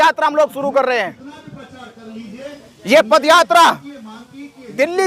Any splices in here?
no; 0 cuts

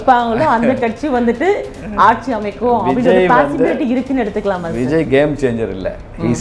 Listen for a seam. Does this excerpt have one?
no; 0 cuts

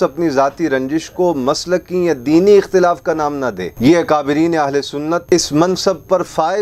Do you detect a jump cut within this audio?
no; 0 cuts

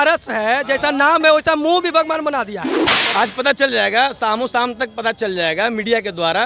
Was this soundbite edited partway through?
yes; 1 cut; at 2.9 s

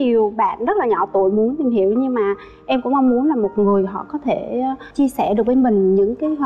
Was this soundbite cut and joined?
no; 0 cuts

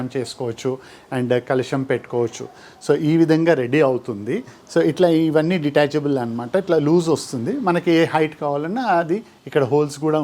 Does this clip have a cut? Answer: no; 0 cuts

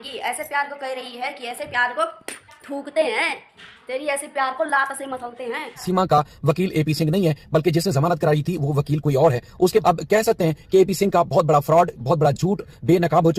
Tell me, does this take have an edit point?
yes; 2 cuts; at 5.8 s, 9.8 s

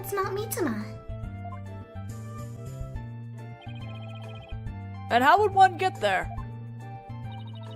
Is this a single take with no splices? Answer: no; 1 cut; at 2.5 s

